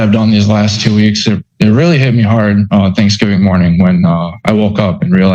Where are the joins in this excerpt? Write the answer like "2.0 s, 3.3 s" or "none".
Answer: none

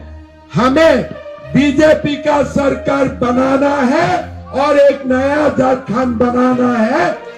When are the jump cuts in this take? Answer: none

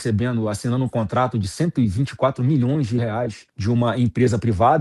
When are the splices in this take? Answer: none

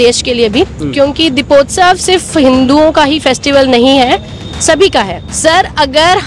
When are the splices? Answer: 5.2 s

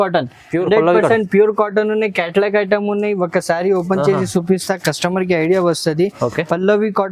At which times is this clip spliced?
none

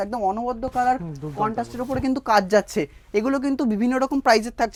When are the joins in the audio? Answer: none

